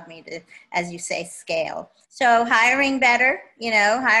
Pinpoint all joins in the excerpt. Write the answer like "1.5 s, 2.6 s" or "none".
2.0 s